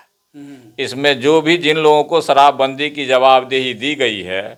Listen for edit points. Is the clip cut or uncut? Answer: uncut